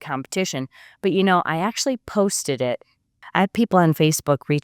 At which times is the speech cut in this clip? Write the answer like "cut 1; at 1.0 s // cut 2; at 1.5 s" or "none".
cut 1; at 3.2 s